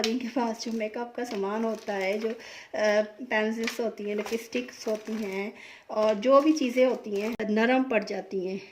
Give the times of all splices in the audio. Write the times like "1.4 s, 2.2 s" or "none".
7.4 s